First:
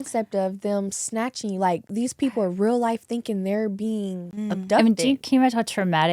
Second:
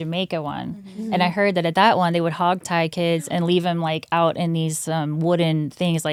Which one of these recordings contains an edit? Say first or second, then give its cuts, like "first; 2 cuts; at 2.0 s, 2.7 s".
first; 2 cuts; at 1.9 s, 4.3 s